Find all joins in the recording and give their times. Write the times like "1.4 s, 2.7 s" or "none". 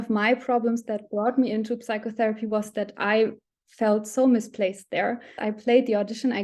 5.4 s